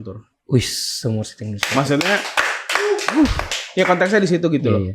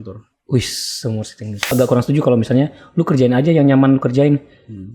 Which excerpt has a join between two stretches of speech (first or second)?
second